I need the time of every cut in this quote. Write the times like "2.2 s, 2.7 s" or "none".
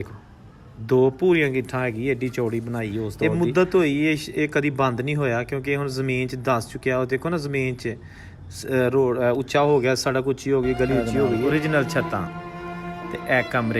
3.2 s, 11.5 s